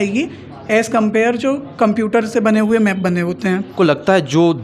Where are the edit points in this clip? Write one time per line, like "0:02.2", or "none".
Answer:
0:03.7